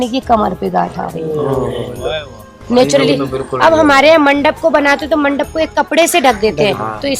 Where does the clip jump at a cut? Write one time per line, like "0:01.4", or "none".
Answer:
none